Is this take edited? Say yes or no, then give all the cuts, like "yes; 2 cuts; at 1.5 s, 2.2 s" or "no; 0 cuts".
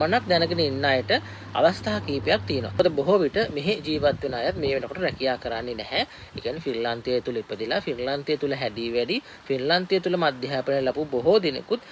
yes; 1 cut; at 2.8 s